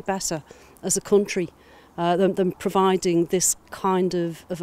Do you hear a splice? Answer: no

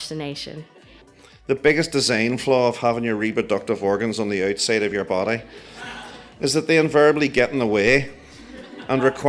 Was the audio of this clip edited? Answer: yes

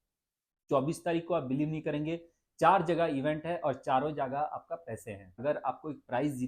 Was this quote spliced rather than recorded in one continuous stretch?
yes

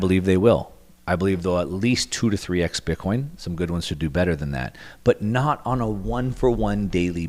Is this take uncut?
yes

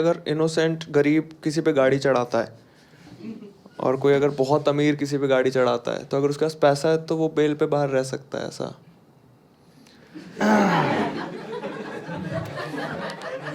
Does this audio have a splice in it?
no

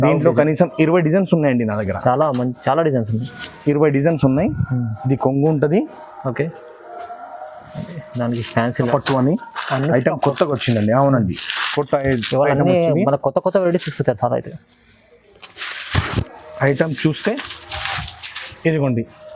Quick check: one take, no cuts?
no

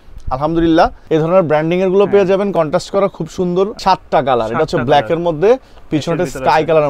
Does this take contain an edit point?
yes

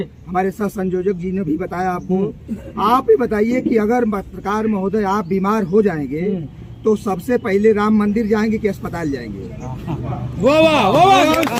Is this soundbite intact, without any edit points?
yes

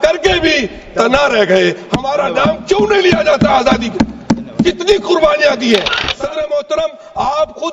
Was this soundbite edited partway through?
yes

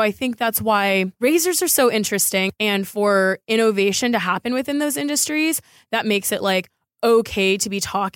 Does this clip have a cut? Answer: yes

